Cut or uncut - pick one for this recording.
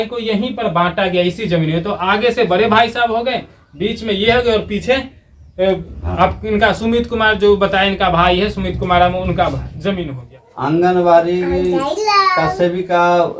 cut